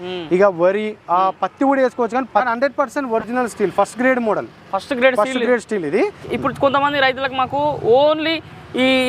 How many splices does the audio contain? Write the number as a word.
two